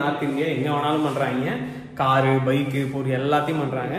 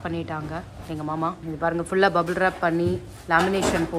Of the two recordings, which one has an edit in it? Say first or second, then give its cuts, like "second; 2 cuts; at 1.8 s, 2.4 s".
second; 1 cut; at 1.4 s